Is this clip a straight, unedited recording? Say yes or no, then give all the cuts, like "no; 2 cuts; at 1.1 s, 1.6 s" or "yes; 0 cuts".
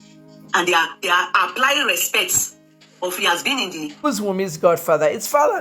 no; 1 cut; at 3.9 s